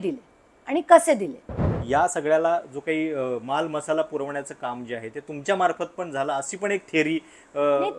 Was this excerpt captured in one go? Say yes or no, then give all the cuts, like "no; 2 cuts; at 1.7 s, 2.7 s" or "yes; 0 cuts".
no; 1 cut; at 1.6 s